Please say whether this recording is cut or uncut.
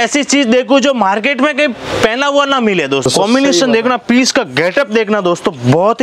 cut